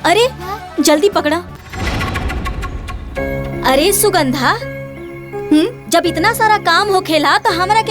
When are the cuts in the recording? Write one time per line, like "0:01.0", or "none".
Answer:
0:01.6